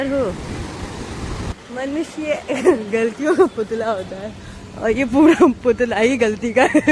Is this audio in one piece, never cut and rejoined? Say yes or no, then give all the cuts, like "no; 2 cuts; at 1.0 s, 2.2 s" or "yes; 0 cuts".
no; 1 cut; at 1.6 s